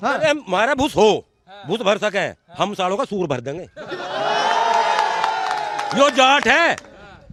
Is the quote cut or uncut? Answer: uncut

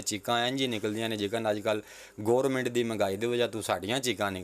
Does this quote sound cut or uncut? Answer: uncut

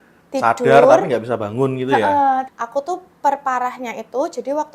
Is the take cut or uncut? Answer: cut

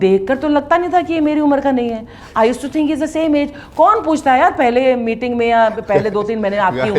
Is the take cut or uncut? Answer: uncut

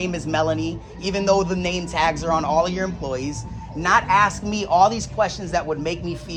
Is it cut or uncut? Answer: uncut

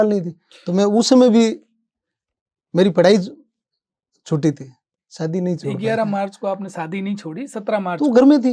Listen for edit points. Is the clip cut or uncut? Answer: uncut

